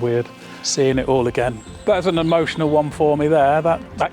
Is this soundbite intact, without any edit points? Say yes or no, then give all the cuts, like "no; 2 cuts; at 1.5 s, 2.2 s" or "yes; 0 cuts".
no; 1 cut; at 1.6 s